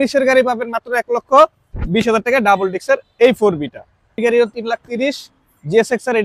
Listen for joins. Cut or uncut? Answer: cut